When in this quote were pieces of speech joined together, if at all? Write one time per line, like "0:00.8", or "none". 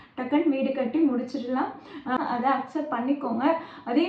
0:02.2